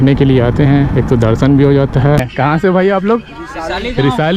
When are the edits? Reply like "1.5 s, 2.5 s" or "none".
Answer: 2.2 s